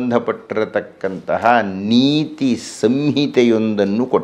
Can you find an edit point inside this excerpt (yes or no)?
no